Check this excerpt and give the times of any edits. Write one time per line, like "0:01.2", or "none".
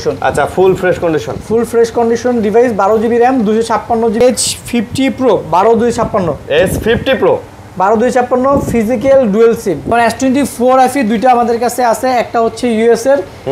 0:04.2
0:09.9